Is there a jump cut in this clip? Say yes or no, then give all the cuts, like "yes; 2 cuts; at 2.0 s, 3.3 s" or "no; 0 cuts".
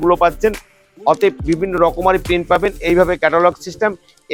no; 0 cuts